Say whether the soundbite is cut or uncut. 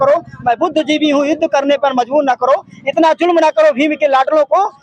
uncut